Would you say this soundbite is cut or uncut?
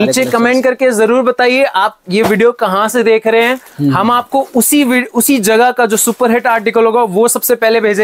uncut